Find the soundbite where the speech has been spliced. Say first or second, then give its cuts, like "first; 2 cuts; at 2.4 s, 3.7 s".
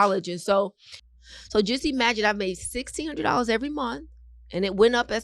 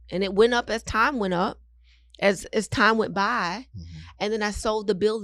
first; 1 cut; at 1.0 s